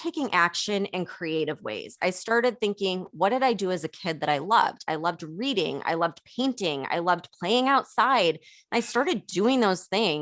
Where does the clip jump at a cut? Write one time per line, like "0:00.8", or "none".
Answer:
none